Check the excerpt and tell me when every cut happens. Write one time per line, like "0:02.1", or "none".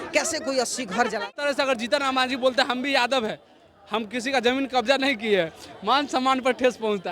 0:01.4